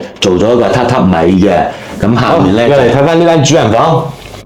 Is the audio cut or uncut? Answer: cut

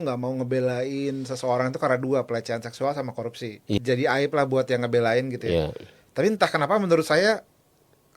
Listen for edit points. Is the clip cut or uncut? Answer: cut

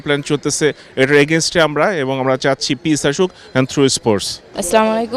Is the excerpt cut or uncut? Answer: uncut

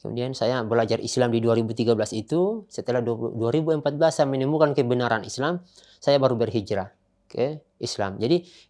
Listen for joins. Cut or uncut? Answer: uncut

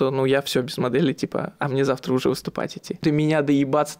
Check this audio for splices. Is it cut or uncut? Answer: cut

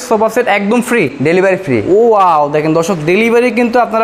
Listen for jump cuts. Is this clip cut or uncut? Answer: cut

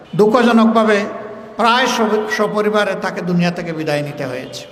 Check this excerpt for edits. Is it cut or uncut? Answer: uncut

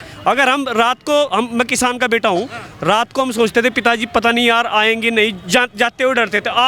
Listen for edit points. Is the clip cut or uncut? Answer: uncut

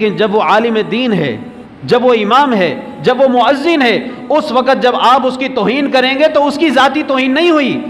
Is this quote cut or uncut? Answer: uncut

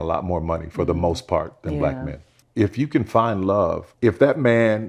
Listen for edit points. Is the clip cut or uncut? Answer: cut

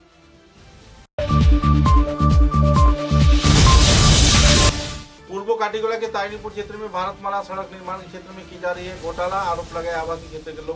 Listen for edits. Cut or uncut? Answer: uncut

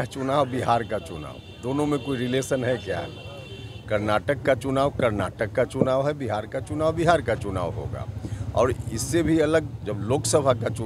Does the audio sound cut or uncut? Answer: uncut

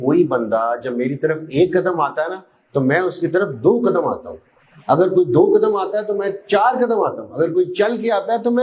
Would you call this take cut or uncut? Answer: uncut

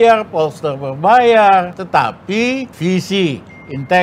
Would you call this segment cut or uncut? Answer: cut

